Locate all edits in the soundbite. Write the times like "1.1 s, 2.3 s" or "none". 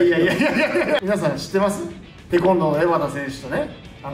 1.0 s